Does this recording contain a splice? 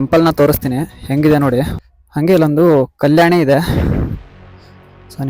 yes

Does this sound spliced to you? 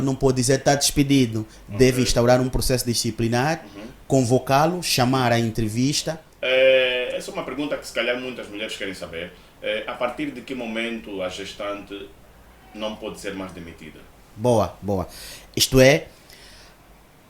yes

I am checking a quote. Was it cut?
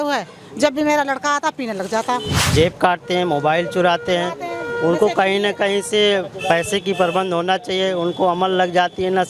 yes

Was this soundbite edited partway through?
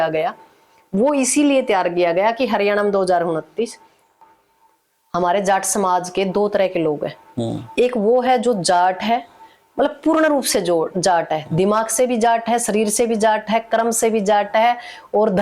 yes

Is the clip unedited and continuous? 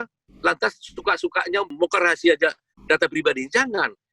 no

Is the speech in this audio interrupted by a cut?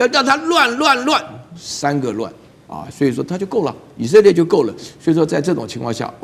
no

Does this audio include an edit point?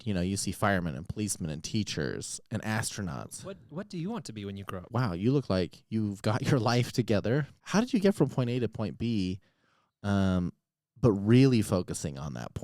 yes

